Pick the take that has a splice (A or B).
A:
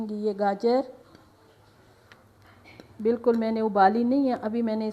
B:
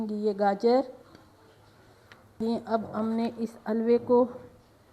B